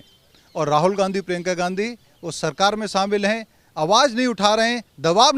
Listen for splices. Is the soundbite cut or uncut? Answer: uncut